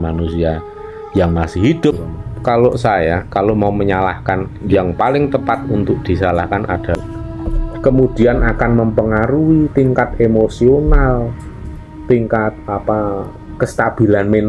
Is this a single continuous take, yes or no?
no